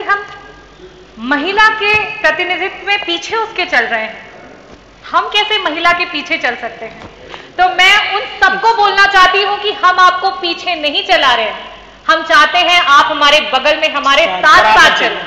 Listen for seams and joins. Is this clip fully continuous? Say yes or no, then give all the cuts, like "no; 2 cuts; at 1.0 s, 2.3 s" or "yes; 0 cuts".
yes; 0 cuts